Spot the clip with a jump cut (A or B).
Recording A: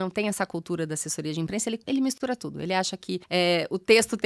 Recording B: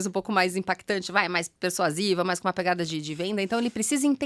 A